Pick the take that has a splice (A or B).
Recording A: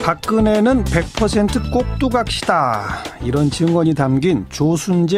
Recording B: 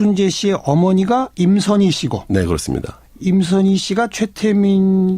B